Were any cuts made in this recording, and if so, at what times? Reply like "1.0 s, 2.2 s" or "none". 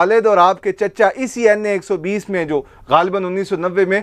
none

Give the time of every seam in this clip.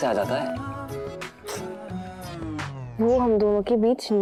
none

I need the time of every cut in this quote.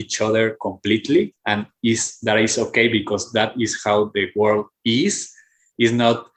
none

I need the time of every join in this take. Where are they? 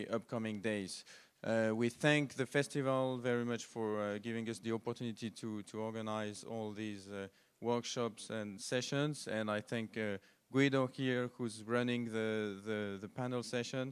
13.0 s

